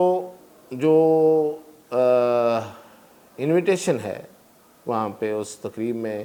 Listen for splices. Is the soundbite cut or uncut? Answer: uncut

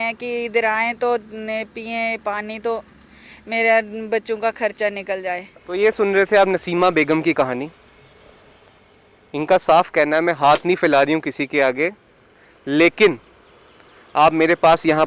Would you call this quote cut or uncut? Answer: uncut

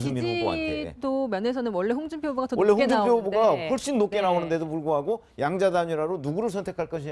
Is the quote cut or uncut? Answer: uncut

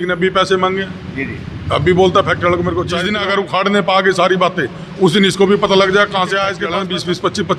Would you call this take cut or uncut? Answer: cut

